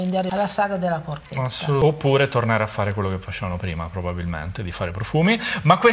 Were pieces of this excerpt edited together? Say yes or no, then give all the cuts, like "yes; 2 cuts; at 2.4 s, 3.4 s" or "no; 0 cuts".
yes; 1 cut; at 1.8 s